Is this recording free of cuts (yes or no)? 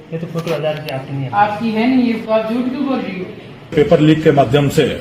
no